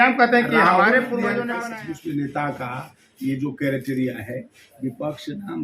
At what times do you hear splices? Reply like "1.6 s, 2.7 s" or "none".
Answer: 1.5 s